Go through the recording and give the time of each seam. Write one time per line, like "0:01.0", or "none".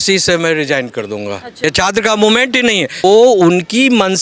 0:01.5
0:03.0